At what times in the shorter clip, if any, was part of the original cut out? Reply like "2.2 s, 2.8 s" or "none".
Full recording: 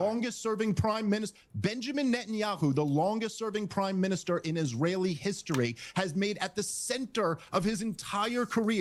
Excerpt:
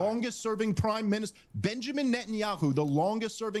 none